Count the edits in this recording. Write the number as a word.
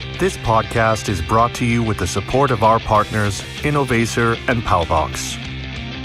one